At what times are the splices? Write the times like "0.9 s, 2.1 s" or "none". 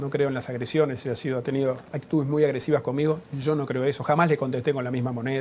1.9 s